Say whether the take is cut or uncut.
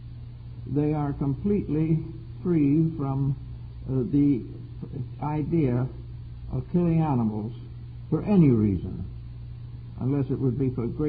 uncut